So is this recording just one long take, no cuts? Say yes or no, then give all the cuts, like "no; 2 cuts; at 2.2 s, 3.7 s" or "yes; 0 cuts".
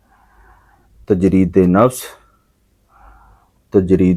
yes; 0 cuts